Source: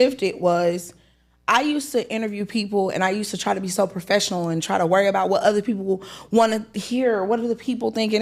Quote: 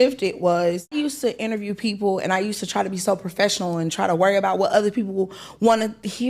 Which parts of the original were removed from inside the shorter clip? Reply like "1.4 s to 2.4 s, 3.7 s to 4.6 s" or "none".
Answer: 0.9 s to 1.6 s